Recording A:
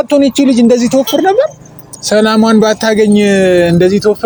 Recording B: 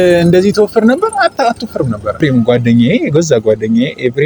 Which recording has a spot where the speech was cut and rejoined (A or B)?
B